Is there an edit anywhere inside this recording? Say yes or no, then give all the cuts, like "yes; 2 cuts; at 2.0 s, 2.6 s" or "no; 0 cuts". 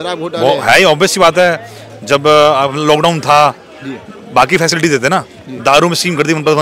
no; 0 cuts